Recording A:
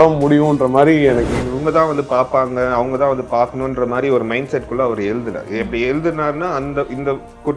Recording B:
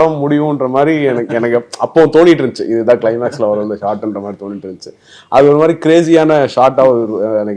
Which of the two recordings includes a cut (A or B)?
A